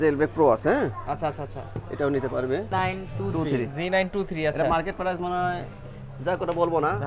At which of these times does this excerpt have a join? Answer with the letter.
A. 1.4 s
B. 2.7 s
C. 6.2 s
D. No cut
B